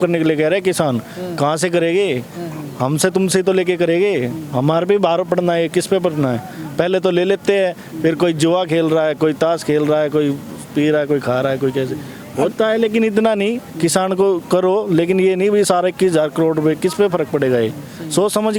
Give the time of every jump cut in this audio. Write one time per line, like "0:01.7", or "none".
none